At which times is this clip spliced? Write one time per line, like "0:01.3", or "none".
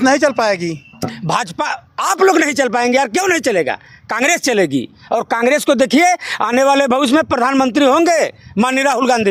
none